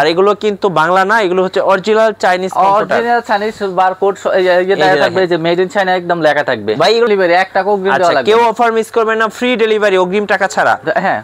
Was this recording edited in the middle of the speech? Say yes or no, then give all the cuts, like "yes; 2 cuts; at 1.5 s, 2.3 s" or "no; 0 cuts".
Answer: yes; 1 cut; at 7.1 s